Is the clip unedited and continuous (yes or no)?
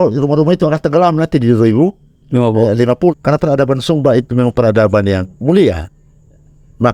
no